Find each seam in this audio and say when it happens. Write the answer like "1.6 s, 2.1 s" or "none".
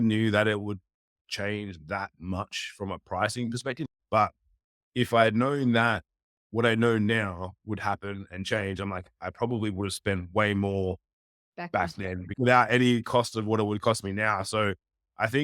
3.9 s, 12.3 s